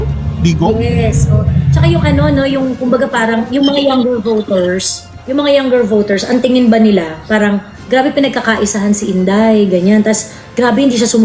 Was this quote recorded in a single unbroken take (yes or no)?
yes